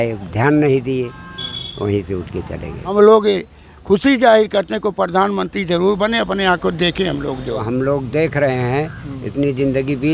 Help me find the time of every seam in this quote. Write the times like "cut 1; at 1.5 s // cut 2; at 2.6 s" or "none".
cut 1; at 2.9 s // cut 2; at 7.6 s